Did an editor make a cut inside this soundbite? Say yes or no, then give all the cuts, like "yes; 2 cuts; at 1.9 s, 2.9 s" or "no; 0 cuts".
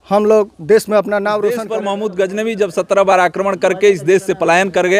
yes; 1 cut; at 1.6 s